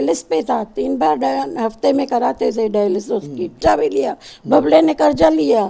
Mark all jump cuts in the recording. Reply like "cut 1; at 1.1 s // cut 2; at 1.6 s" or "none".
cut 1; at 3.6 s